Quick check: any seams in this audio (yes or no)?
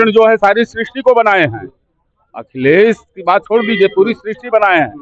no